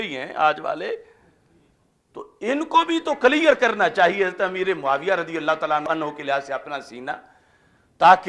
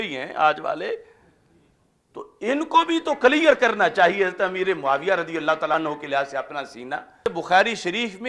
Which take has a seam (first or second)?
second